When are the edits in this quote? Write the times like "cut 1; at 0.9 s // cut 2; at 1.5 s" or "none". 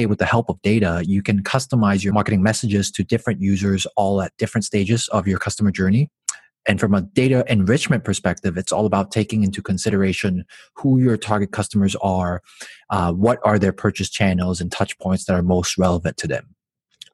cut 1; at 2.1 s

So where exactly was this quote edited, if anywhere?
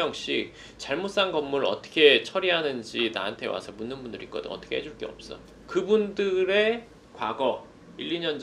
none

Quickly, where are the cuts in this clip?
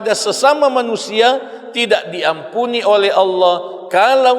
none

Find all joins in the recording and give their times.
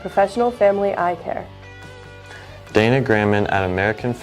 cut 1; at 1.3 s

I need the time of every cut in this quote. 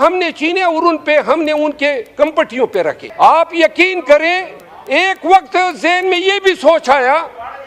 cut 1; at 3.0 s

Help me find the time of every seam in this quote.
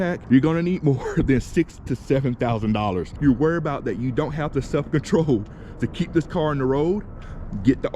cut 1; at 3.1 s

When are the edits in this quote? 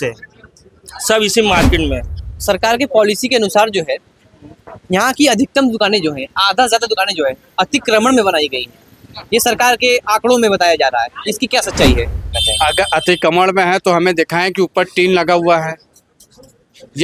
cut 1; at 2.2 s // cut 2; at 12.4 s

